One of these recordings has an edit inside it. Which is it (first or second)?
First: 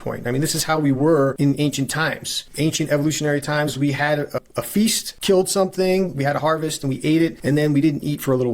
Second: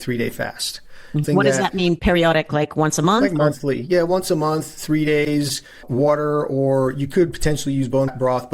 first